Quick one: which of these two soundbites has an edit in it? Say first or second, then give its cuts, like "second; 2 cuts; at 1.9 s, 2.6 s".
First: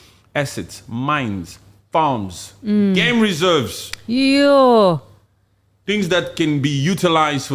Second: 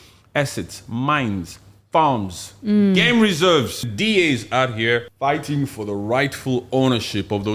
second; 2 cuts; at 3.9 s, 5.1 s